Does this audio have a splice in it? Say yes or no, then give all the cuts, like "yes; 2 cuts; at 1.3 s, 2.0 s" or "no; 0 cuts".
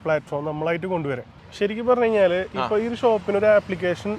yes; 1 cut; at 1.4 s